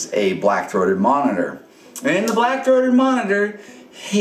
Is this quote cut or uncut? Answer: uncut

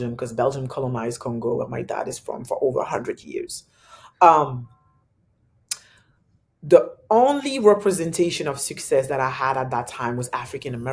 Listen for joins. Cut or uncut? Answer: uncut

